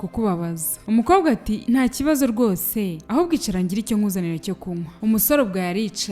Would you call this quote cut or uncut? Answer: uncut